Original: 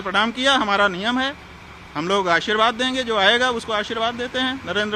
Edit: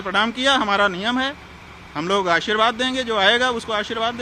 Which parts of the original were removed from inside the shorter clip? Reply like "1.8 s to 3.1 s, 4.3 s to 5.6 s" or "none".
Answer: none